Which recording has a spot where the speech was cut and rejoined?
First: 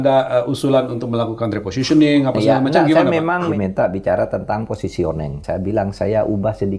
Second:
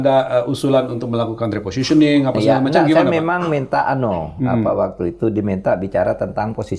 first; 2 cuts; at 3.5 s, 5.4 s

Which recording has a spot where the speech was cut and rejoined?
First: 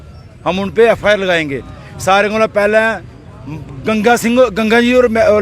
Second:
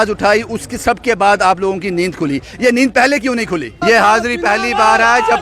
second; 1 cut; at 3.7 s

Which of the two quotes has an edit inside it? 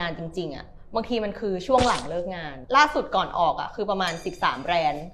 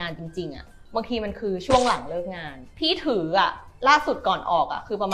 first; 1 cut; at 2.5 s

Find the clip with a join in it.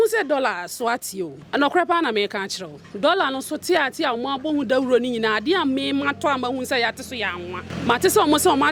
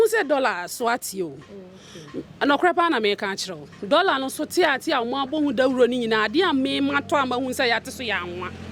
first; 2 cuts; at 1.4 s, 7.7 s

